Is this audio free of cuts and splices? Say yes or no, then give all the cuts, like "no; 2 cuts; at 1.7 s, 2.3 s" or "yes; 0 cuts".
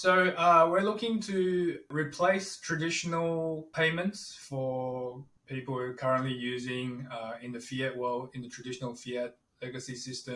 no; 3 cuts; at 1.9 s, 3.7 s, 5.3 s